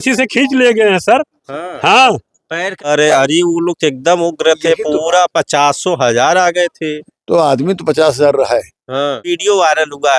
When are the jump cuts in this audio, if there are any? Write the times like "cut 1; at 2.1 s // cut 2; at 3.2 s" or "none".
cut 1; at 2.9 s // cut 2; at 9.3 s